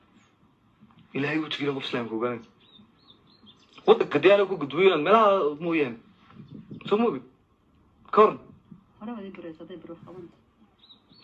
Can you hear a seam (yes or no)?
no